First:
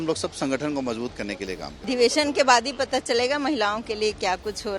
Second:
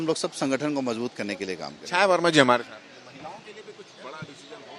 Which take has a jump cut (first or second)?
first